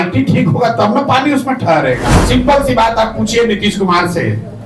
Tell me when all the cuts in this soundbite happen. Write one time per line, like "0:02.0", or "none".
0:02.1